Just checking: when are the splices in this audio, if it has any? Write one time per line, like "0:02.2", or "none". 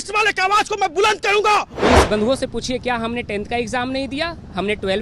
0:01.7